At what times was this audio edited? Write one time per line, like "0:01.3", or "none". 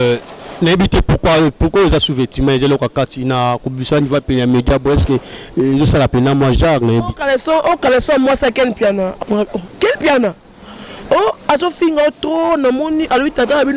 0:09.1